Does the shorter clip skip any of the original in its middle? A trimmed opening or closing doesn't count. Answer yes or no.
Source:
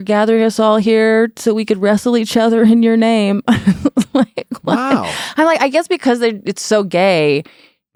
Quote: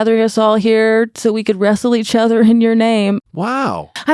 yes